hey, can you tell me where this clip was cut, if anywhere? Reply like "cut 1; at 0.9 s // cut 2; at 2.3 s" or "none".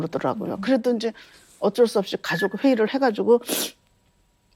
none